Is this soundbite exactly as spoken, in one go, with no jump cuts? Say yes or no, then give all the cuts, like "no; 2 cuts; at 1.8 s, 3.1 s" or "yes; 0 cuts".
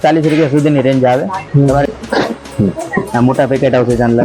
no; 1 cut; at 1.8 s